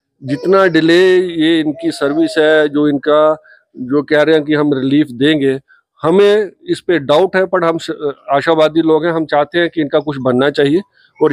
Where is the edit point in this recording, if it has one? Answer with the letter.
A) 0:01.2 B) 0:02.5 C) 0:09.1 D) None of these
D